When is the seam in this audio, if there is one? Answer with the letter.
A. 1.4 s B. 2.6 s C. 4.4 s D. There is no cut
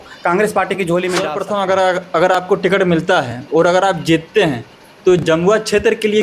A